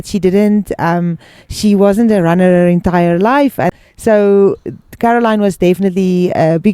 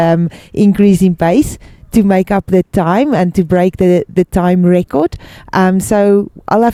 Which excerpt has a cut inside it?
first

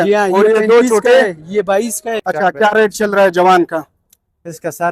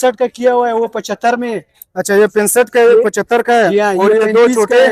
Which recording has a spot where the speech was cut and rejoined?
first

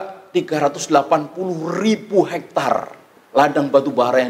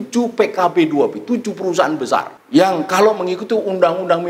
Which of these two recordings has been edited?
second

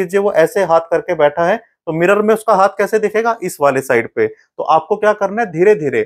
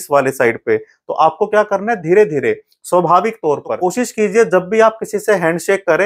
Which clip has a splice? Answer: second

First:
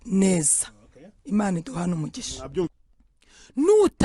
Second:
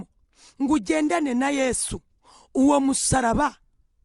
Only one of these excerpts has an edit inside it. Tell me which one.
first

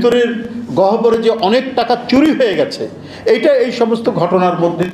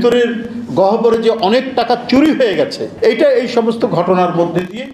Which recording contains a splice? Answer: second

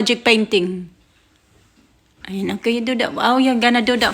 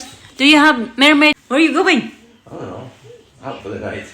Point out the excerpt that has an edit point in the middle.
second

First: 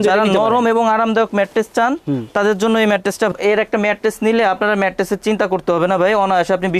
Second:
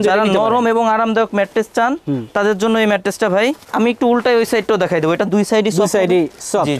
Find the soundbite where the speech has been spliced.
first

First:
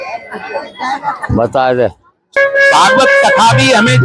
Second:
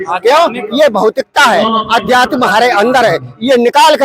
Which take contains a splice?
first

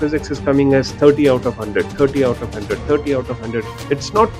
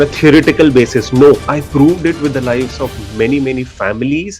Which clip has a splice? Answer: second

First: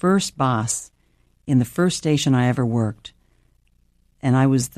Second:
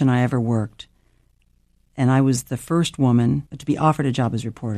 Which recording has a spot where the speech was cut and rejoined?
second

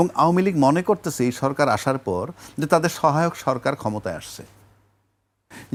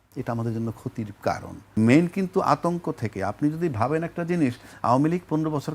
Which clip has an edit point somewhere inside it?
second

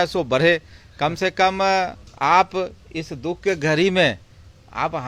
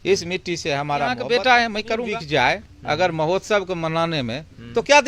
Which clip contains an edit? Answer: second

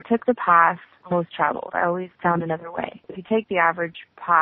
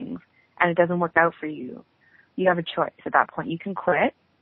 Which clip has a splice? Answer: first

